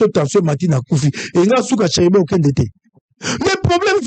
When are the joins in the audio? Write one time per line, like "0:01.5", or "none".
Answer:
none